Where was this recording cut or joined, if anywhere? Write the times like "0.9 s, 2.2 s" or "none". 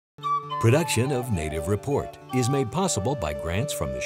none